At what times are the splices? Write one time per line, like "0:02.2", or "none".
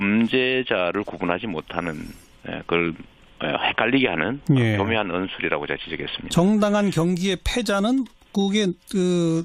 0:06.0